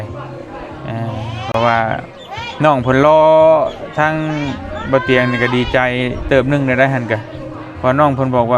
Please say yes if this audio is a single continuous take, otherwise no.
yes